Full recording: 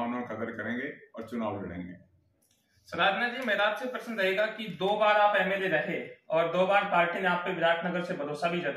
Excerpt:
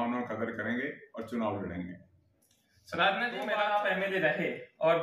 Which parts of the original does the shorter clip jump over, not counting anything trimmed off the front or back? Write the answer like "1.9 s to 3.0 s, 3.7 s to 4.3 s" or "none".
3.5 s to 5.0 s